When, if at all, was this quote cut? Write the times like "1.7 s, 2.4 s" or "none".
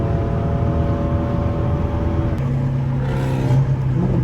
2.4 s